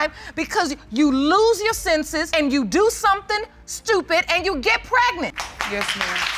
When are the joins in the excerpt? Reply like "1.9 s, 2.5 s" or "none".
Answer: none